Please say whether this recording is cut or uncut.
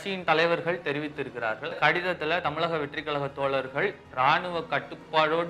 cut